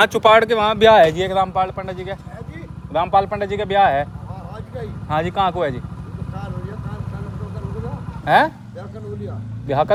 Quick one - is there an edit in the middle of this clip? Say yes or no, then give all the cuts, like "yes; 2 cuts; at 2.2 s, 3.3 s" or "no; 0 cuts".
no; 0 cuts